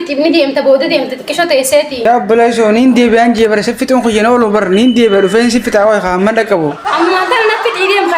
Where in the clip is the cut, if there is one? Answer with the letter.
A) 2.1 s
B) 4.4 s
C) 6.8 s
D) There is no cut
A